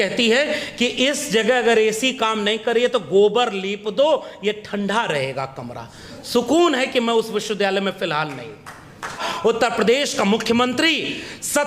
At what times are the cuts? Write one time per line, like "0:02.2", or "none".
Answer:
0:09.3